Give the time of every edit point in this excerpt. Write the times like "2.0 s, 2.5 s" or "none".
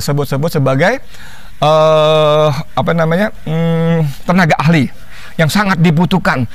none